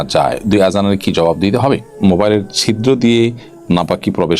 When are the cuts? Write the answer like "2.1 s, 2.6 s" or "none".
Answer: 1.9 s